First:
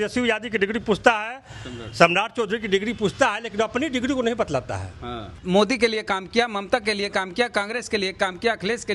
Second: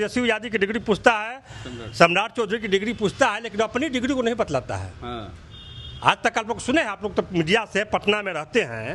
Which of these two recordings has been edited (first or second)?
first